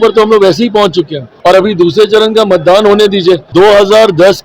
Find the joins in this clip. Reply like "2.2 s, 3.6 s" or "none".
1.2 s, 3.4 s